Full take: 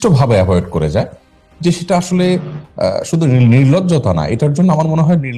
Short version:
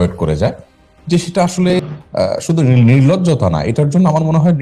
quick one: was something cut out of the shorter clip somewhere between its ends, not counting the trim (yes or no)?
yes